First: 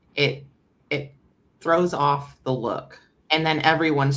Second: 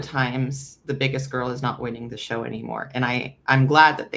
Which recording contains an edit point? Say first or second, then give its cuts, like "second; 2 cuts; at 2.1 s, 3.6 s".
first; 1 cut; at 3.2 s